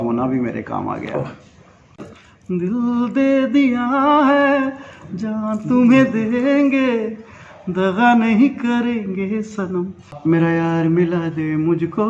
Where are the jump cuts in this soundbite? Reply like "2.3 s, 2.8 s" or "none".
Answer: 2.0 s, 10.1 s